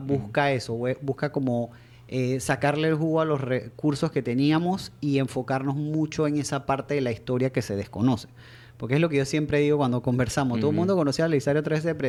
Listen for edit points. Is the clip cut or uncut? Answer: uncut